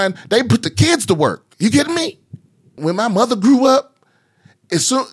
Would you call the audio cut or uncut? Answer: cut